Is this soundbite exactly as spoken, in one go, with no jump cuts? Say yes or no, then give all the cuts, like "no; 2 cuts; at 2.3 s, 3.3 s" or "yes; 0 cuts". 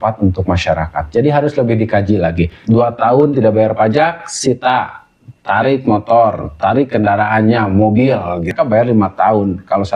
no; 2 cuts; at 2.6 s, 8.5 s